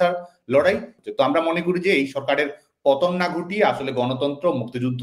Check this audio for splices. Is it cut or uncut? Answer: cut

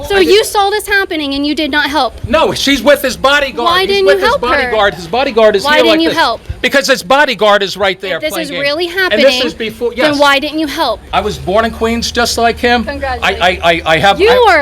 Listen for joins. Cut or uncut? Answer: cut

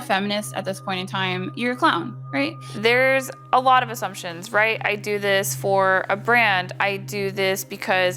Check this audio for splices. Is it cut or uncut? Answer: uncut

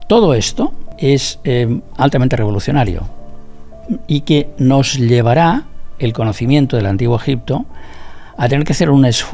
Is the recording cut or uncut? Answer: cut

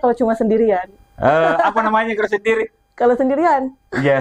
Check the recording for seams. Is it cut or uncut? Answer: uncut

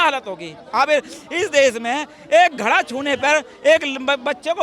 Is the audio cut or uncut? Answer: uncut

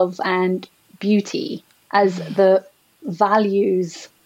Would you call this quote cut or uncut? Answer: uncut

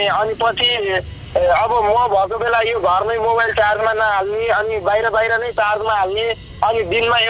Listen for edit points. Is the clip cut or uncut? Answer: uncut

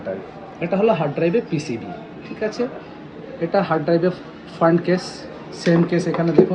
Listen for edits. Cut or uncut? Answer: uncut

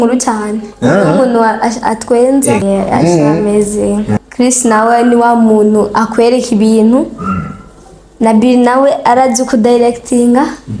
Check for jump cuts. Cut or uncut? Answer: cut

